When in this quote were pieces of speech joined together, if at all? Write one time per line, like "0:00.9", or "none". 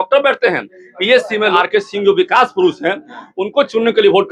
0:01.5